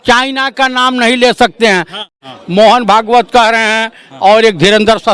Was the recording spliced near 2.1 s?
yes; 1 cut; at 2.1 s

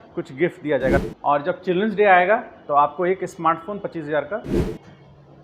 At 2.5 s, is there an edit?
no; 2 cuts; at 1.0 s, 4.5 s

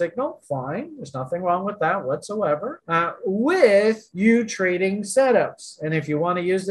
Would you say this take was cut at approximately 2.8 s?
yes; 1 cut; at 2.8 s

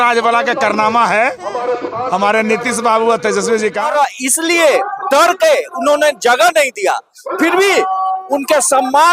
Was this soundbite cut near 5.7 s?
no; 1 cut; at 3.9 s

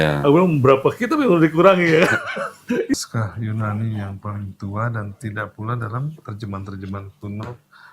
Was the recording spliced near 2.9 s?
yes; 1 cut; at 2.9 s

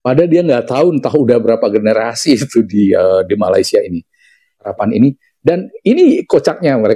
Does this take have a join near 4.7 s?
yes; 1 cut; at 4.7 s

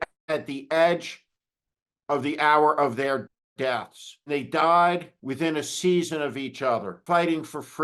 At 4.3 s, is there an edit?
yes; 3 cuts; at 4.3 s, 5.2 s, 6.9 s

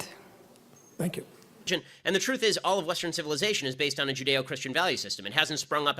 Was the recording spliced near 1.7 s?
yes; 1 cut; at 1.7 s

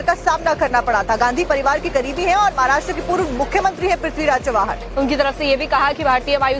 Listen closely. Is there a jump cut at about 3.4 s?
no; 1 cut; at 4.7 s

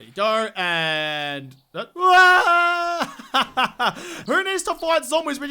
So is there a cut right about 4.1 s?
yes; 1 cut; at 4.1 s

